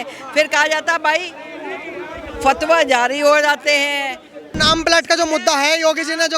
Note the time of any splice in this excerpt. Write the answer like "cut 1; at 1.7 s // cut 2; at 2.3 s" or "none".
cut 1; at 4.5 s